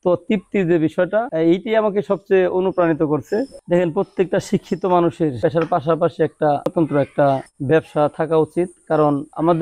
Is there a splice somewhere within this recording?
no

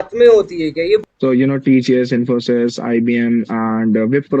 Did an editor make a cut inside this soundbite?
yes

